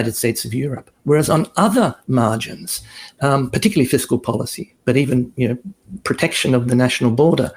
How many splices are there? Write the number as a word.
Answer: zero